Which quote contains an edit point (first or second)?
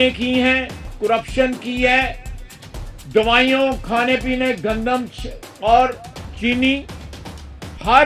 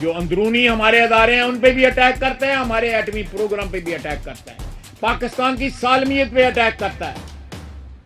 second